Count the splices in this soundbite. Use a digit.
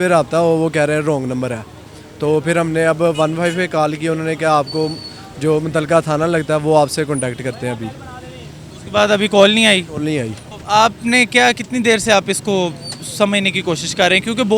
0